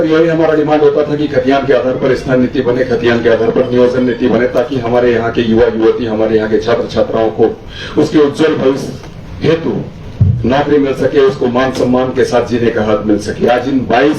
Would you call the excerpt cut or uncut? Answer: cut